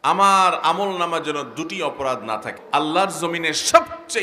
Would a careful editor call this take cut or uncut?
cut